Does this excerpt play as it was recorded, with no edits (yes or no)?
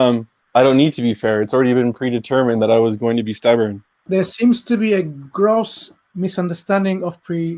no